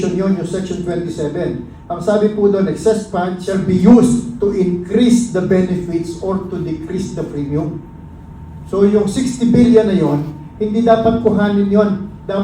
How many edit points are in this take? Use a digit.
1